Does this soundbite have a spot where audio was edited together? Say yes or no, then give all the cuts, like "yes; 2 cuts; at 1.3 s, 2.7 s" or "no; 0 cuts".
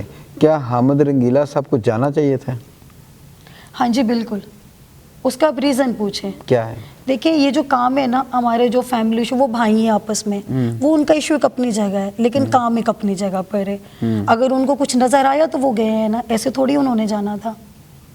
no; 0 cuts